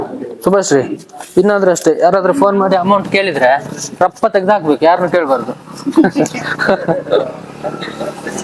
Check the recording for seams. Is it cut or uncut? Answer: uncut